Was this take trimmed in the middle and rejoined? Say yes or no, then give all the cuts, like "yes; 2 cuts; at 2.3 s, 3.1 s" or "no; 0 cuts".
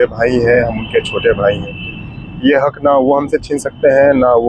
no; 0 cuts